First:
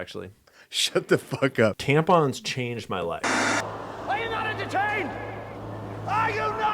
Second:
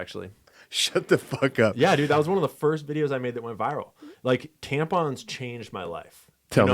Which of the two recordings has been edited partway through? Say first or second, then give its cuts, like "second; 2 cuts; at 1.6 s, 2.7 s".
first; 2 cuts; at 1.7 s, 3.2 s